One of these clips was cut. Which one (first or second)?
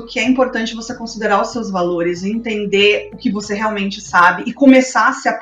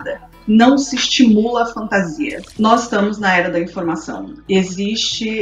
second